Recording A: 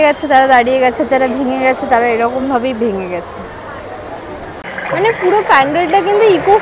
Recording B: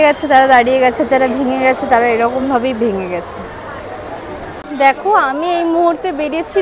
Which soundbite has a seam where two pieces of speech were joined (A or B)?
A